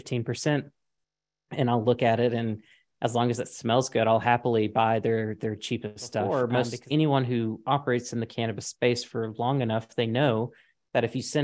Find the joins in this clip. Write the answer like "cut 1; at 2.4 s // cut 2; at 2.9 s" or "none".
cut 1; at 6.3 s